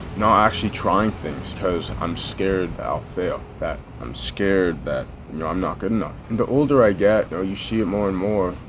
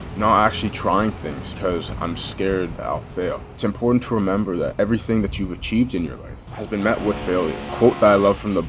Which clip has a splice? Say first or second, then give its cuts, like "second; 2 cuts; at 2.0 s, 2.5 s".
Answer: second; 2 cuts; at 3.5 s, 6.4 s